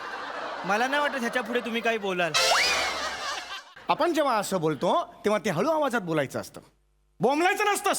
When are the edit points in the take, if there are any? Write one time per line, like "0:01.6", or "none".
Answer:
0:03.3